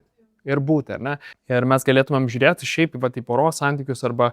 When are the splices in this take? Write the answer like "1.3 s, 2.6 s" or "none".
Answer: 1.3 s